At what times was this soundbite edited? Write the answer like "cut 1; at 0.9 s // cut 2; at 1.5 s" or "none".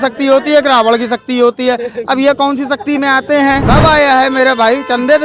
cut 1; at 3.6 s